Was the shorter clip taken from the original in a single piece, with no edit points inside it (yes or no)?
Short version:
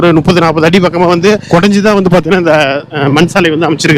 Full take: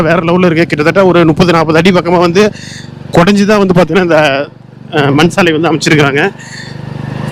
no